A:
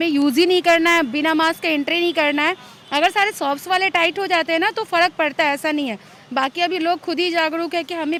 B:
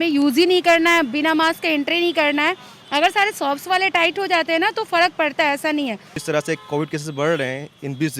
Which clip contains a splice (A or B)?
B